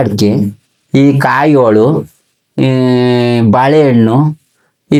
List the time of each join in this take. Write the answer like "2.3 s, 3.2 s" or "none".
none

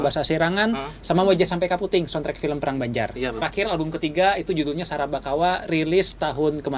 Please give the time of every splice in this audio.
3.4 s

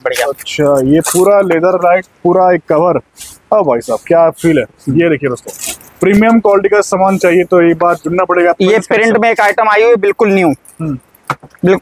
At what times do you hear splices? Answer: none

